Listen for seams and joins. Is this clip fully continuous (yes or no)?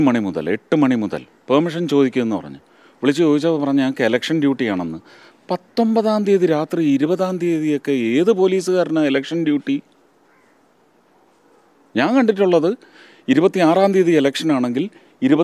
yes